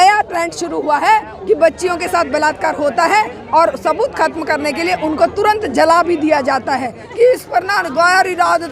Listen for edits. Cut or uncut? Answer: cut